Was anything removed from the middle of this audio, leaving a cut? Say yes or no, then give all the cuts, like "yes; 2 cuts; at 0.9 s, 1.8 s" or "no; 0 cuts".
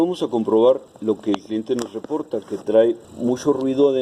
yes; 2 cuts; at 0.9 s, 3.1 s